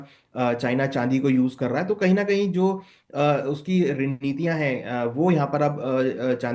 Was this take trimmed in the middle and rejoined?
no; 0 cuts

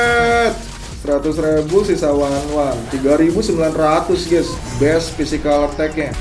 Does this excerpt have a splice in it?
no; 0 cuts

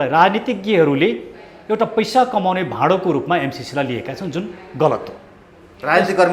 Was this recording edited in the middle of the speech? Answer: no; 0 cuts

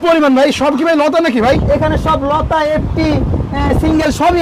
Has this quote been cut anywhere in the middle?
no; 0 cuts

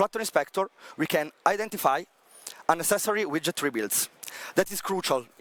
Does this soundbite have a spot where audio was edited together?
no; 0 cuts

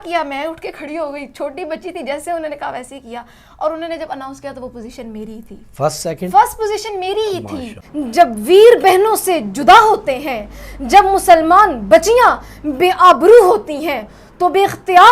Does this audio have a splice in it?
yes; 1 cut; at 7.8 s

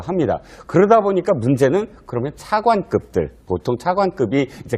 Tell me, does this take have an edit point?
no; 0 cuts

